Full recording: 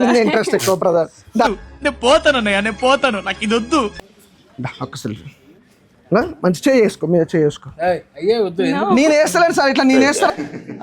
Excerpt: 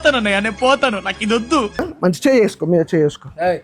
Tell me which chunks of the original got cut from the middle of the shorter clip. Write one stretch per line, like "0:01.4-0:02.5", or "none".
0:04.0-0:06.2